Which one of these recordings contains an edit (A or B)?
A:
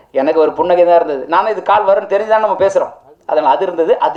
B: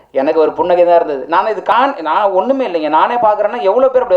B